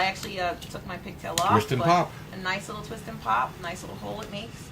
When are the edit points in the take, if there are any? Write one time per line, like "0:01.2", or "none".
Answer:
0:03.0